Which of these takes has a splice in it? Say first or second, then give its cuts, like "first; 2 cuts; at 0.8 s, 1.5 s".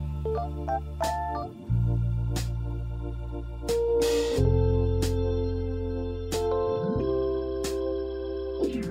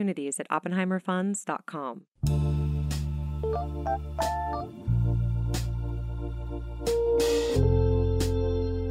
second; 1 cut; at 2.1 s